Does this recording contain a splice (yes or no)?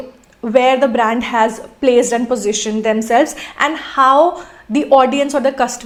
no